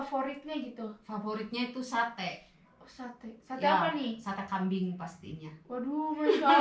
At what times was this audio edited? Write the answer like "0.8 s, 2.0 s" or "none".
none